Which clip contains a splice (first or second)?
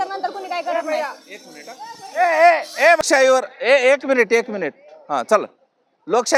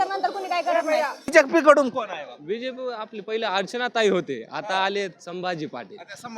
second